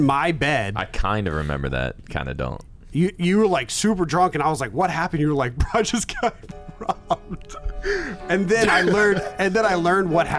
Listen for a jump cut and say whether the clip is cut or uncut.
uncut